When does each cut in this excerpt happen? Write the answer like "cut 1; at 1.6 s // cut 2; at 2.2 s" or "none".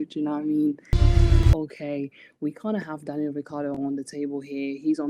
cut 1; at 1.2 s

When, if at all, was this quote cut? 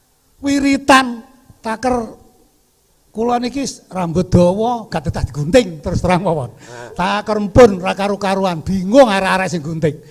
none

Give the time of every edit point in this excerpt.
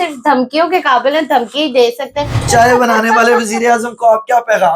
cut 1; at 2.4 s

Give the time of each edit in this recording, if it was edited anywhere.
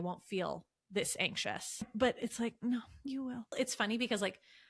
cut 1; at 1.9 s // cut 2; at 3.5 s

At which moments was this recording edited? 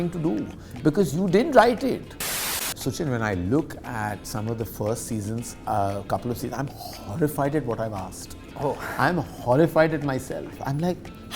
cut 1; at 2.5 s

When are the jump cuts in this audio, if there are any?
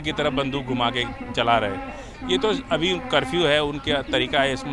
none

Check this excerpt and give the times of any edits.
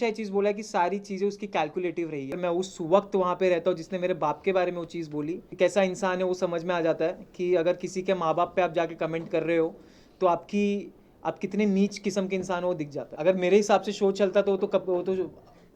cut 1; at 2.4 s // cut 2; at 5.5 s // cut 3; at 13.0 s

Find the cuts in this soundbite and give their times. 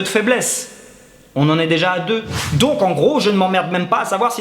cut 1; at 2.5 s

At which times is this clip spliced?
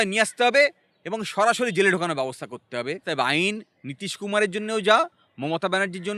cut 1; at 3.0 s

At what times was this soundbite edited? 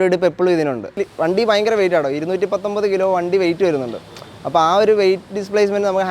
cut 1; at 0.9 s

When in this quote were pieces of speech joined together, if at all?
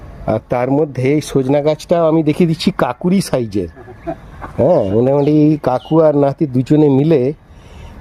none

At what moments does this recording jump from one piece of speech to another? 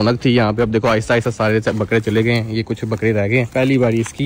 none

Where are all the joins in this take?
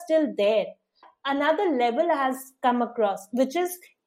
cut 1; at 1.1 s

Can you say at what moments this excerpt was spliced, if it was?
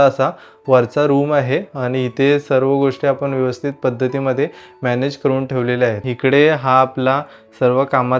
cut 1; at 6.0 s

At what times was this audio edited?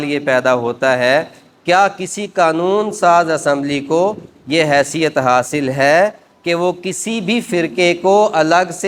none

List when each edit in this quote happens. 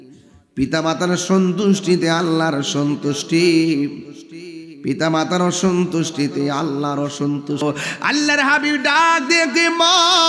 cut 1; at 7.6 s

